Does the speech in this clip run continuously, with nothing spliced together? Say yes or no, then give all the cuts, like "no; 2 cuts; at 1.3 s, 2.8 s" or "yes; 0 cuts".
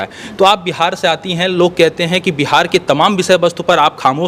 yes; 0 cuts